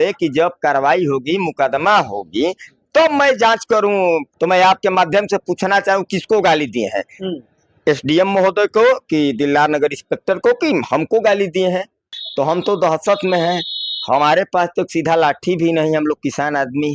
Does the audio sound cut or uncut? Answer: cut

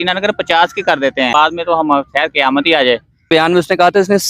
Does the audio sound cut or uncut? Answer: cut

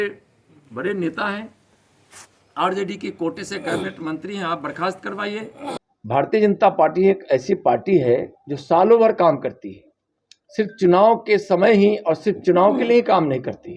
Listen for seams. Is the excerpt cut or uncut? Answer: cut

